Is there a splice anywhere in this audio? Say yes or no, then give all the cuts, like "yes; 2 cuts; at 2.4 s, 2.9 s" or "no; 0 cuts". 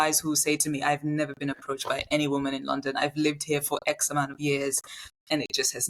no; 0 cuts